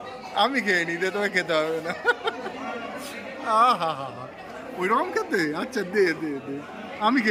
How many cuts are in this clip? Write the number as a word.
zero